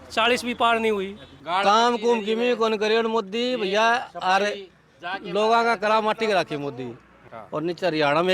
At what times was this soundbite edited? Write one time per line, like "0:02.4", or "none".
0:01.4
0:07.4